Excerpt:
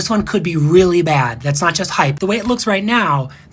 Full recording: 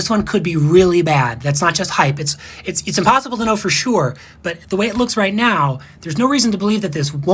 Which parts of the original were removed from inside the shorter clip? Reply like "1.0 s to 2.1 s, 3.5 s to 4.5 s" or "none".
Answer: 2.1 s to 4.6 s